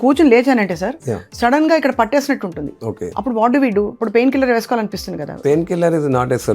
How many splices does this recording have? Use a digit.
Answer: 2